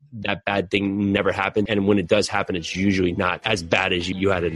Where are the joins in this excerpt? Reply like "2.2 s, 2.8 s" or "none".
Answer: 1.7 s, 3.4 s